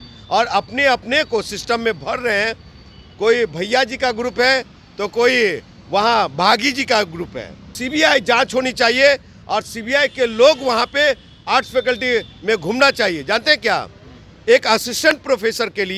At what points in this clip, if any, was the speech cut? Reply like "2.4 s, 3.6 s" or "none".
7.8 s